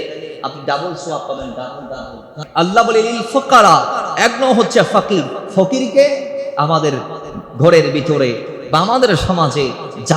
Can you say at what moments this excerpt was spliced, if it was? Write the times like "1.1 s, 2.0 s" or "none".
2.4 s